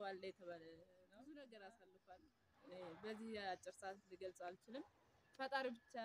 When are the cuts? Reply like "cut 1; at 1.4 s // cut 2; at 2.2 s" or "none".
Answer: cut 1; at 1.1 s